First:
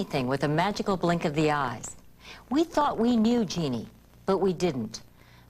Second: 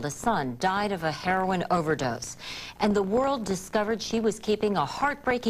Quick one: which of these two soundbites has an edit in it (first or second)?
first